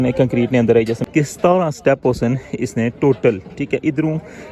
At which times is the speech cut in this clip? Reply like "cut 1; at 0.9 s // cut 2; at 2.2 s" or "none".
cut 1; at 1.0 s